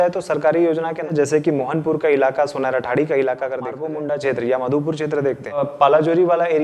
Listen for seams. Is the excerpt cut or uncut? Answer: cut